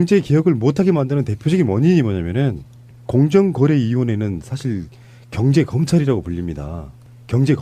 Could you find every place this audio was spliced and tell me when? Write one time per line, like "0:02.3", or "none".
0:05.8